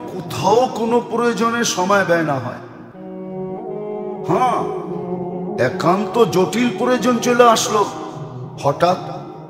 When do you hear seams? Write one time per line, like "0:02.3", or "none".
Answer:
none